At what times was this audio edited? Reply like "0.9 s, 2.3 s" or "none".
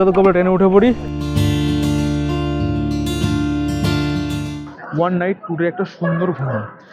1.1 s, 4.6 s